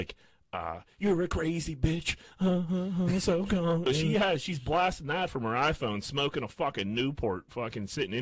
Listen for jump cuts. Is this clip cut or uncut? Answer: cut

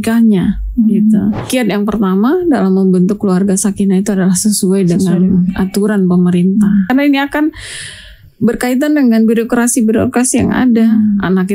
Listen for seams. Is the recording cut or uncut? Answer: cut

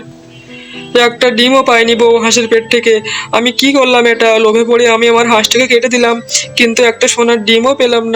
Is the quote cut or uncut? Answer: uncut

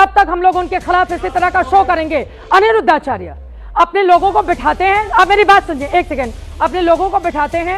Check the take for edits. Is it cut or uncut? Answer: uncut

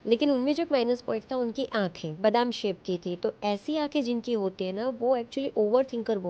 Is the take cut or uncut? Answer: cut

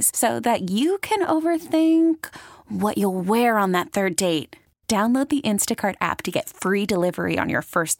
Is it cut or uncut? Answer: uncut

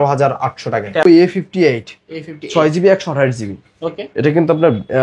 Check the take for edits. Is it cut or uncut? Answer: cut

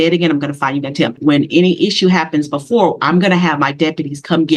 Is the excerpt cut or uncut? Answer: cut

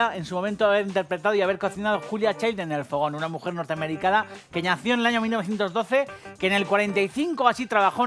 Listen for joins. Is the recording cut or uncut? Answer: uncut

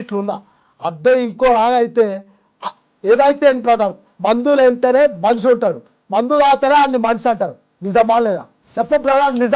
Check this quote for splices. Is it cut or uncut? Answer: uncut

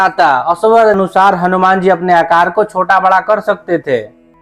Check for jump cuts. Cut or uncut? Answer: cut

